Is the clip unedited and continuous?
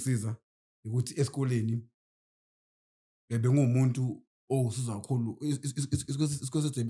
yes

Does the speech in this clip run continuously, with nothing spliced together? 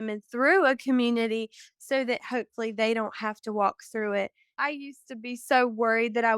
no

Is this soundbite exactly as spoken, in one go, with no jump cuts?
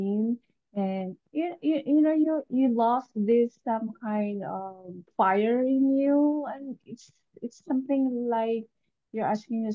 yes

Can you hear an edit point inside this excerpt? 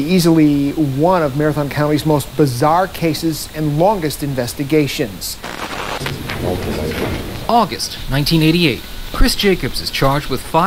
yes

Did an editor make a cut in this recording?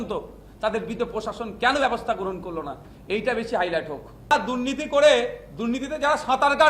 yes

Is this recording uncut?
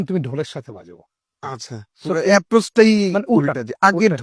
yes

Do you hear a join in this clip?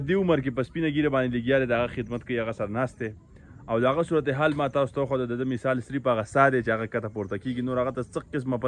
no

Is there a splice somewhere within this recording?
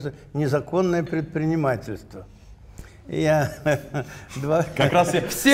no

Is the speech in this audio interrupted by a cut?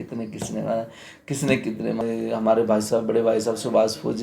yes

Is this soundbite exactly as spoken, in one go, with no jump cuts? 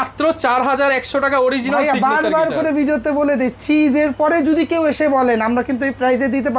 yes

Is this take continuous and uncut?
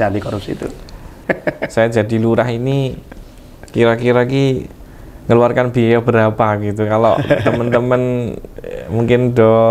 no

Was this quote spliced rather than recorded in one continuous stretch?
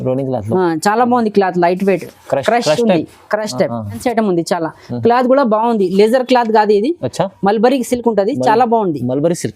yes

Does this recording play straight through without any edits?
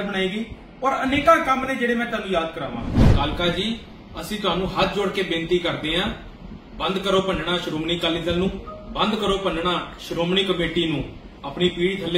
no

